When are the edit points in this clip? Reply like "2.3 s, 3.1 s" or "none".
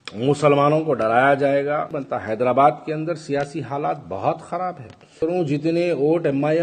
1.9 s, 5.2 s